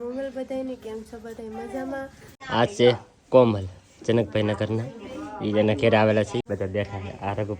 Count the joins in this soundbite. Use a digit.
2